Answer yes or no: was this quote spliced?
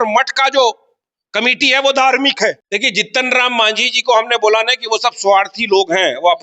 yes